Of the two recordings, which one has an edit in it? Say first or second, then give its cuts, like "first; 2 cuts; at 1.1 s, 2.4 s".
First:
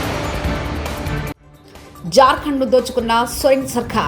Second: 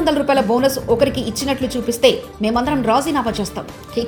first; 2 cuts; at 1.1 s, 1.9 s